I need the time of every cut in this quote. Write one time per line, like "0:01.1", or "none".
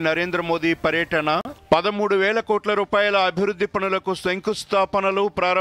none